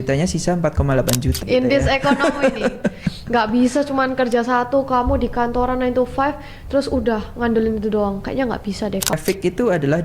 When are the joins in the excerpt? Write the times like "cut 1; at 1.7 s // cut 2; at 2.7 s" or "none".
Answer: cut 1; at 1.4 s // cut 2; at 9.1 s